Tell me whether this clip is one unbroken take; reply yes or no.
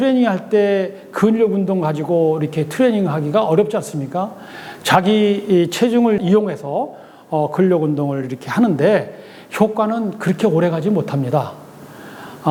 yes